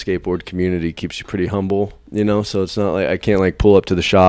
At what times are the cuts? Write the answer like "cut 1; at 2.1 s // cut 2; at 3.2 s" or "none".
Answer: cut 1; at 2.0 s